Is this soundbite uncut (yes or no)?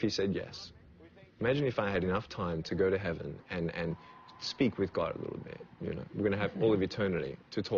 yes